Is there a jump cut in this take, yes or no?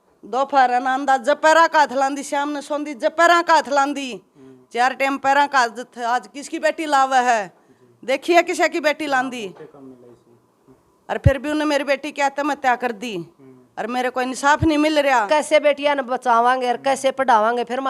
yes